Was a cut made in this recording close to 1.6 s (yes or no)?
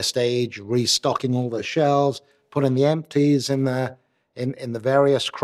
yes